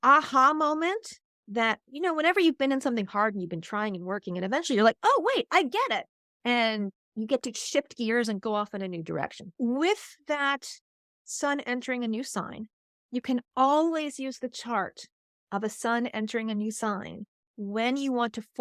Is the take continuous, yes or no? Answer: no